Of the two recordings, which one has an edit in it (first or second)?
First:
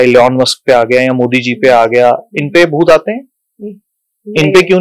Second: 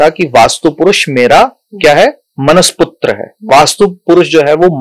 second